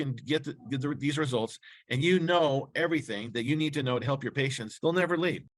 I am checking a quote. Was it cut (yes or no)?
yes